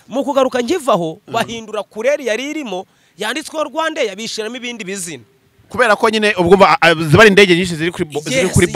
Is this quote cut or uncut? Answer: uncut